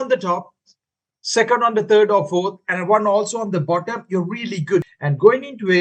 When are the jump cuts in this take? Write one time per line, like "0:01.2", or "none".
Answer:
0:04.9